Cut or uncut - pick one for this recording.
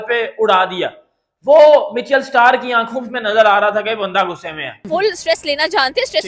cut